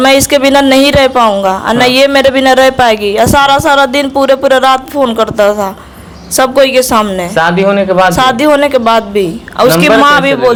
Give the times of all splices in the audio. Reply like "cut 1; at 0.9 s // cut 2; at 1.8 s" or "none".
none